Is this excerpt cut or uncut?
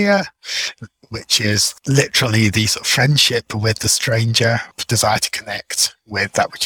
cut